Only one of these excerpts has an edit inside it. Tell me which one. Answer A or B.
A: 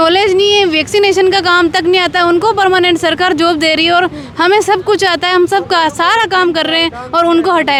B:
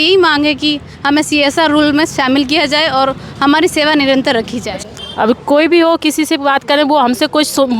B